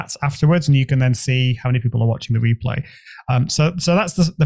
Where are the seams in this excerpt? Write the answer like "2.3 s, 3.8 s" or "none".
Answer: none